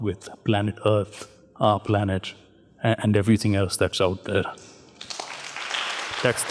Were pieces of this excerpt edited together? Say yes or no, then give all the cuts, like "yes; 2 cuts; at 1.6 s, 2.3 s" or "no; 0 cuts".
no; 0 cuts